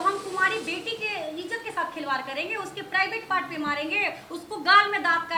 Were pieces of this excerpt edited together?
no; 0 cuts

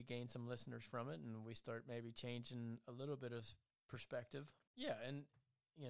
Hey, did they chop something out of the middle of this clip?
yes; 1 cut; at 4.6 s

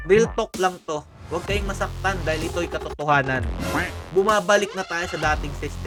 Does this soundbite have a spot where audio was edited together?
no; 0 cuts

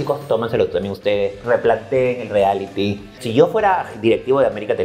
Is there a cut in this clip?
yes; 1 cut; at 3.2 s

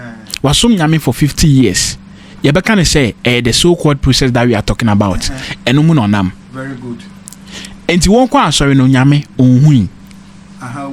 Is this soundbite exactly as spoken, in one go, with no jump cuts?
yes; 0 cuts

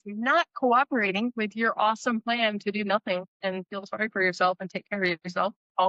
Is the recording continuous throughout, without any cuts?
yes; 0 cuts

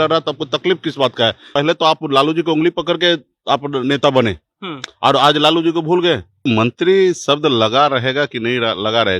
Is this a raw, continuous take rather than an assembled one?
no; 2 cuts; at 1.5 s, 6.5 s

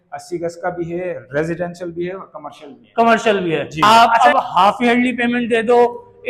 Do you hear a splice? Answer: yes; 1 cut; at 3.8 s

